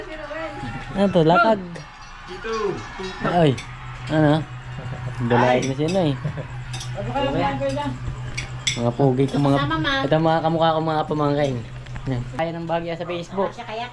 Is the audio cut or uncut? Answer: cut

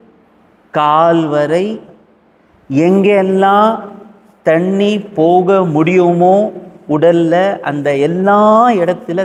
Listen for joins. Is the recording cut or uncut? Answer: uncut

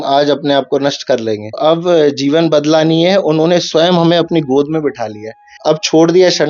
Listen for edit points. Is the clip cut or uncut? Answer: cut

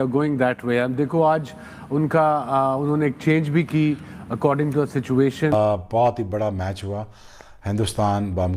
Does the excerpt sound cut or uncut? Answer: cut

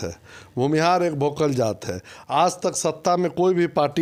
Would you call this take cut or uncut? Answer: uncut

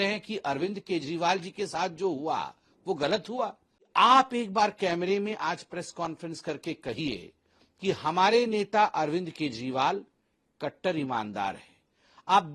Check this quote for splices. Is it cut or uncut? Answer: cut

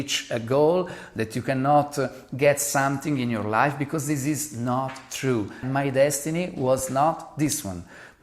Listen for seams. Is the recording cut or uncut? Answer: cut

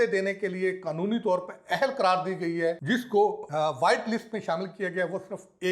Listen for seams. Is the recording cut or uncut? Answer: cut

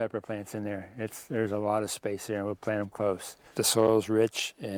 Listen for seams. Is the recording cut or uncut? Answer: cut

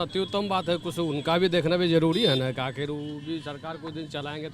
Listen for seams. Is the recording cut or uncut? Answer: uncut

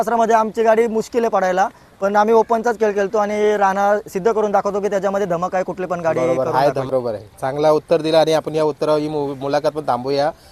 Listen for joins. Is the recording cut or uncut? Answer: cut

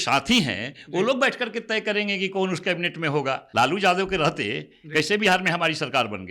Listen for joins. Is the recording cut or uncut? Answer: cut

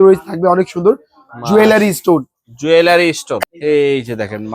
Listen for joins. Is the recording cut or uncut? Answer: cut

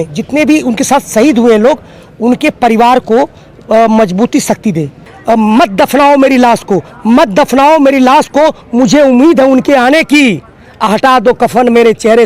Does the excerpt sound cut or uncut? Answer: cut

